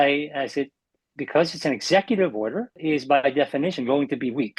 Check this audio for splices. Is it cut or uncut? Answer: cut